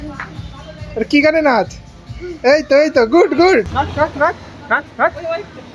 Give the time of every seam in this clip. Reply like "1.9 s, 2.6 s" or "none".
none